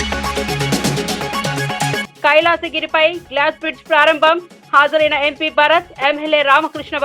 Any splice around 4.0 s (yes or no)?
no